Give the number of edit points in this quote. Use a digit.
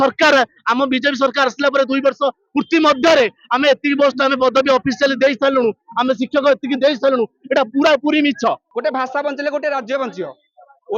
1